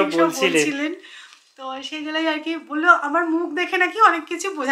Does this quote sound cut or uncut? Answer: uncut